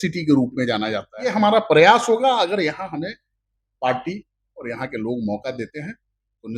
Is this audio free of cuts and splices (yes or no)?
no